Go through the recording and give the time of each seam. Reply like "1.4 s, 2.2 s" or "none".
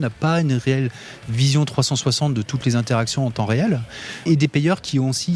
4.2 s